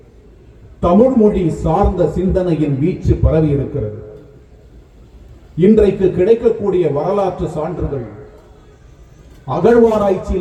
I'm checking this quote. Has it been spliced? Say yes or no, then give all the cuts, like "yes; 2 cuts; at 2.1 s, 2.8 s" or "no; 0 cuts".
no; 0 cuts